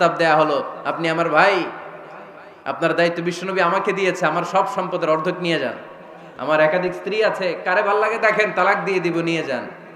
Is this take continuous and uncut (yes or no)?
yes